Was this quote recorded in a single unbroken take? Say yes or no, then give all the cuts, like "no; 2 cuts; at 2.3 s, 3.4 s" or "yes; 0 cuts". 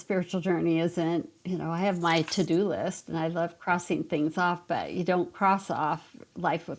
yes; 0 cuts